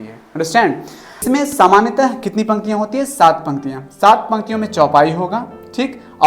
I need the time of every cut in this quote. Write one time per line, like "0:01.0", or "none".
0:01.2